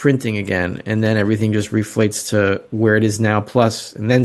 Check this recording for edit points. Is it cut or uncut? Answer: uncut